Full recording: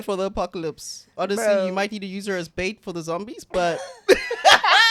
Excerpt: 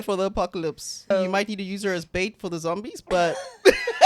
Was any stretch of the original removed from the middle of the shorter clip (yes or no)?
yes